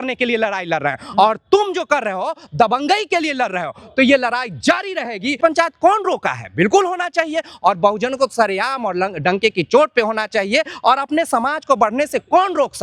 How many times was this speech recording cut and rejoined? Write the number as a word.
one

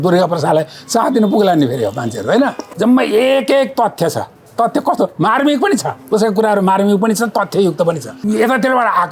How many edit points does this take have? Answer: two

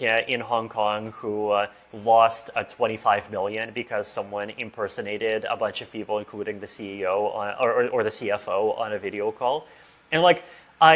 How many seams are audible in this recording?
zero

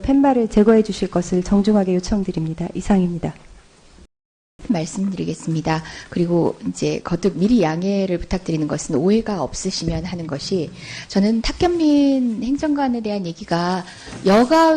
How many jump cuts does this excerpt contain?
one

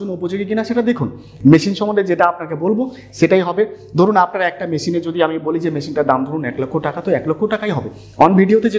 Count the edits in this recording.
zero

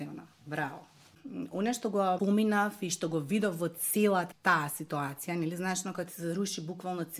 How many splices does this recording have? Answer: three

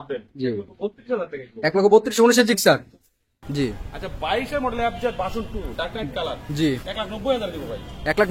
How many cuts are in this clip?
one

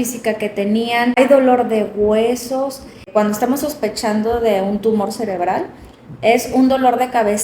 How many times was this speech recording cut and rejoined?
two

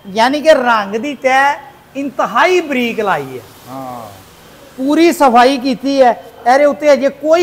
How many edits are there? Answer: zero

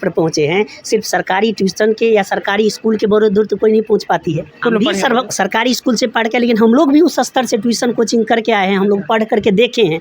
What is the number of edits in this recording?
one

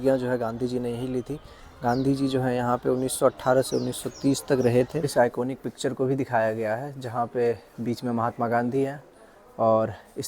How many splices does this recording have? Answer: one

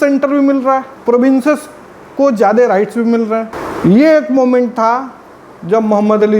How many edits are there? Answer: two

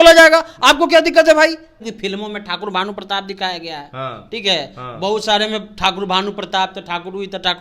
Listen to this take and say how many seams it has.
one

